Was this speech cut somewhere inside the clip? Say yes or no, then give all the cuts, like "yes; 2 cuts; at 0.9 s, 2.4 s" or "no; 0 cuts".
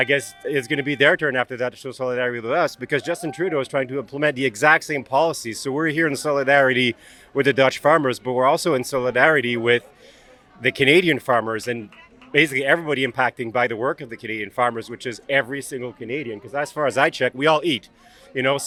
no; 0 cuts